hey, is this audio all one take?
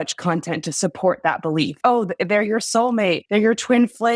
no; 2 cuts; at 1.8 s, 3.2 s

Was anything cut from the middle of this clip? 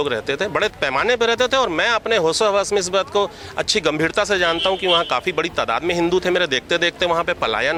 no; 0 cuts

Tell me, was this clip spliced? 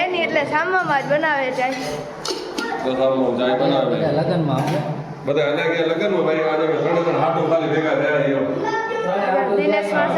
no; 0 cuts

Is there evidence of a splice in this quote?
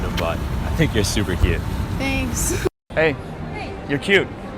yes; 1 cut; at 2.8 s

